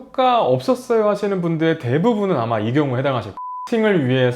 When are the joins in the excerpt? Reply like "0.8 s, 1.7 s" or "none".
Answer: 3.5 s